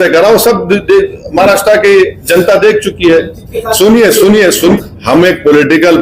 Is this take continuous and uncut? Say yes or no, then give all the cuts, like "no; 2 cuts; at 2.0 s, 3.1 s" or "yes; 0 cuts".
no; 1 cut; at 4.8 s